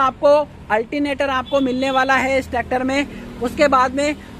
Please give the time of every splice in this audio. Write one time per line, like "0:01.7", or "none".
none